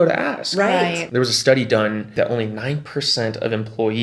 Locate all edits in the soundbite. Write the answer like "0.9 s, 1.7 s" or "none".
1.1 s, 2.0 s